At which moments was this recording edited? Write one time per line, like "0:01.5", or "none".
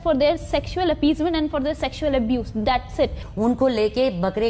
0:03.2